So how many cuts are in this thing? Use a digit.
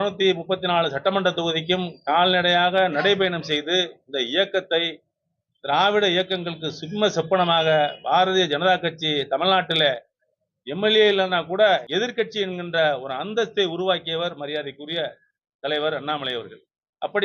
1